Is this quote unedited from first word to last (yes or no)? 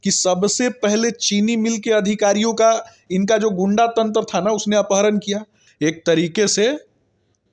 no